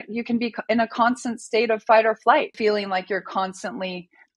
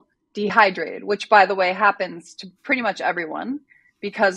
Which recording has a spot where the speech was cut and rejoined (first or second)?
first